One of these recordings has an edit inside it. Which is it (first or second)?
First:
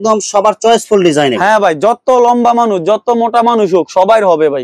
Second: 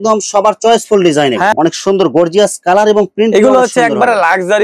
second